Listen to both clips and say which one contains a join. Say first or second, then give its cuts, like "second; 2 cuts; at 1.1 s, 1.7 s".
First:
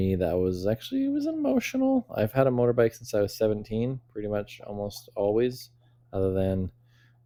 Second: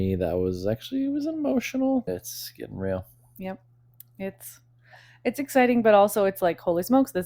second; 1 cut; at 2.1 s